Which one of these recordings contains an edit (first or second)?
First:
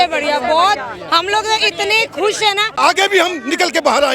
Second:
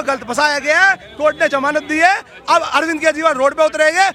first